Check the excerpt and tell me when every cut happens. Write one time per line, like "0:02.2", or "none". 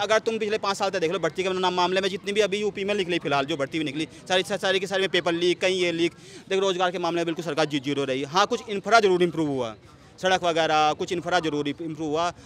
none

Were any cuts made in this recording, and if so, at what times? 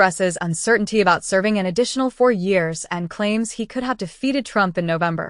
none

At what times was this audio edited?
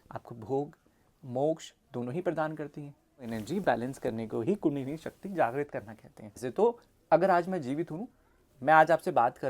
0:03.3
0:06.4

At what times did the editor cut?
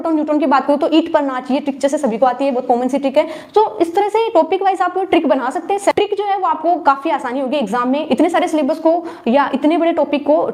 none

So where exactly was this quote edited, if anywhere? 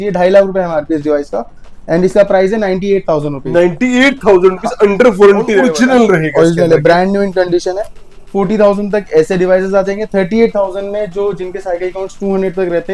0:05.7

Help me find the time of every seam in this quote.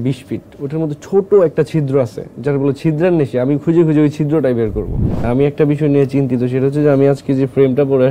0:05.2

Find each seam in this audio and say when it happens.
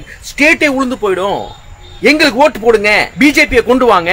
0:03.1

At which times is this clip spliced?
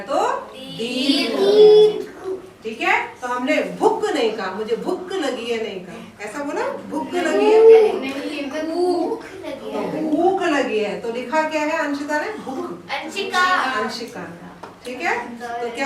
none

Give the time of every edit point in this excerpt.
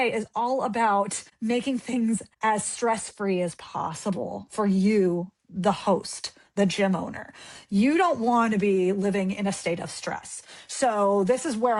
none

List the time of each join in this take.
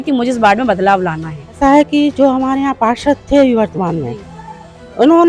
0:01.6

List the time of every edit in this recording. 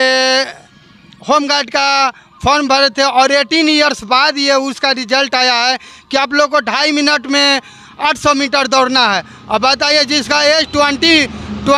none

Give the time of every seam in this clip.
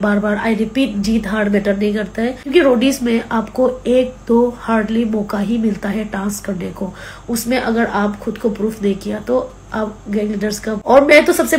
0:02.4
0:10.8

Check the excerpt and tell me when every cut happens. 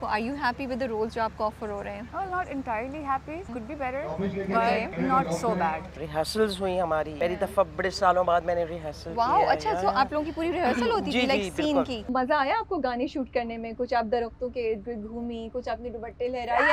0:02.0
0:03.5
0:04.9
0:06.1
0:07.1
0:12.0

